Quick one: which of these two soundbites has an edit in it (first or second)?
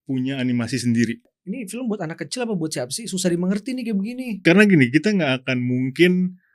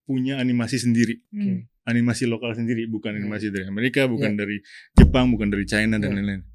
first